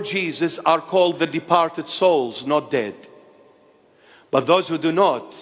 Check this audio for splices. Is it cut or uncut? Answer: uncut